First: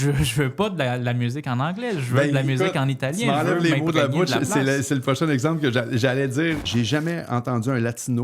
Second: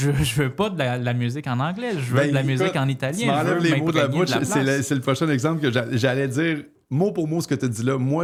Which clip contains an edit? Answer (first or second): first